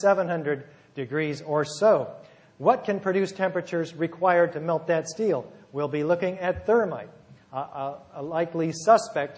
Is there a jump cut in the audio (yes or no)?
no